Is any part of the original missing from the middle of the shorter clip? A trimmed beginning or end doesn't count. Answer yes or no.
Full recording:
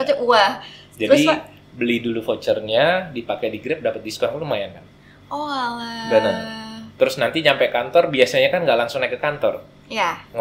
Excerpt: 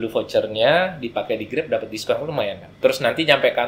yes